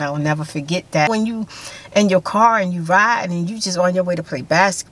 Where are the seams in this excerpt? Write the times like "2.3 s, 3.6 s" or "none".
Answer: 1.1 s